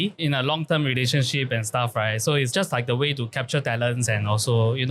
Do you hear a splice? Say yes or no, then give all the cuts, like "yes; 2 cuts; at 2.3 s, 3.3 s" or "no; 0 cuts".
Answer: no; 0 cuts